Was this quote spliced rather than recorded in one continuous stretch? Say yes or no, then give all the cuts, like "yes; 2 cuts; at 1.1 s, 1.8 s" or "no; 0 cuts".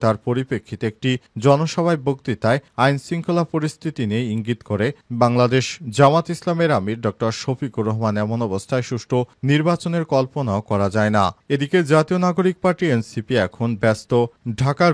no; 0 cuts